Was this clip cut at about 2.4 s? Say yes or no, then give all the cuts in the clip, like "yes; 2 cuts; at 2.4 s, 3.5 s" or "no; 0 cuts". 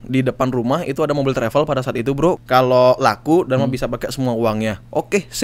yes; 1 cut; at 2.4 s